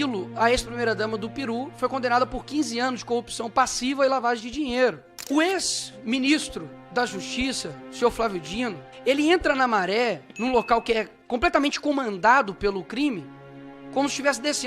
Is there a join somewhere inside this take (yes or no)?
yes